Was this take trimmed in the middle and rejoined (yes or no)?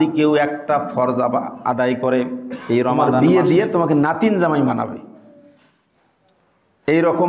yes